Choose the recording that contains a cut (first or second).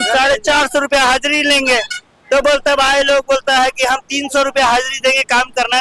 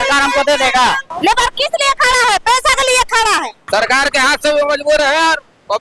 second